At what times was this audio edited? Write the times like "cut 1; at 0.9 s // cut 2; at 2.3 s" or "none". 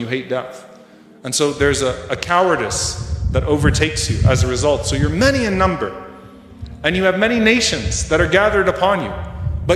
none